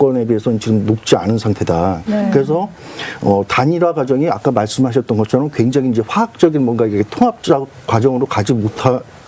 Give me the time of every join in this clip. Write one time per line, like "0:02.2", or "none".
none